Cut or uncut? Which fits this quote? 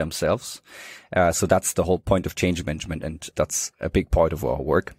cut